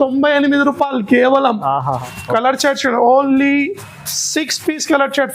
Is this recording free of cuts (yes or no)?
no